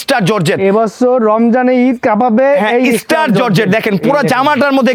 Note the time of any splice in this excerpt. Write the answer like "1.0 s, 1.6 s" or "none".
none